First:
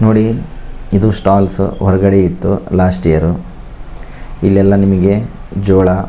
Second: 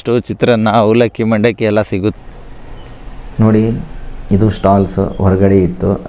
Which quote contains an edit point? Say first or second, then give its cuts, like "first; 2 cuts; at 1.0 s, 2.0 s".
second; 1 cut; at 2.2 s